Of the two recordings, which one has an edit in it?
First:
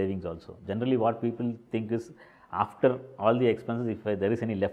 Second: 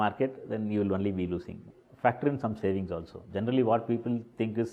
second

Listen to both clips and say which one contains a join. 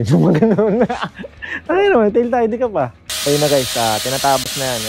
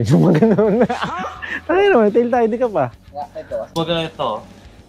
first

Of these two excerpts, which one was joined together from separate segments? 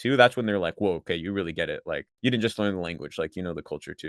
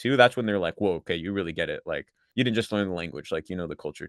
first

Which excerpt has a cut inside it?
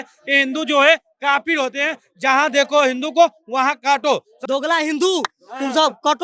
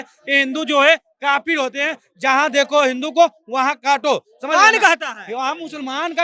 first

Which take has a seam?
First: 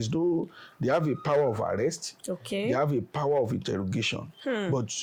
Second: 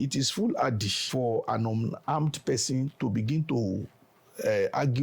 second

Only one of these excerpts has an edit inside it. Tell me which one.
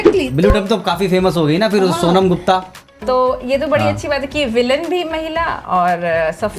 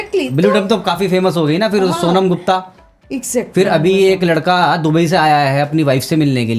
first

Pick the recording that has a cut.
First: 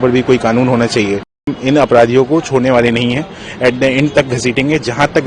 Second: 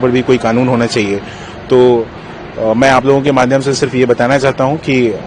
first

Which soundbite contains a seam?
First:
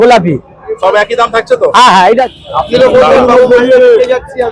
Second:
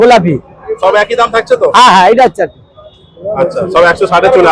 first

